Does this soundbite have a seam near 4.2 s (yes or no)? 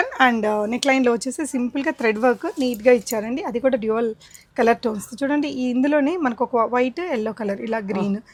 no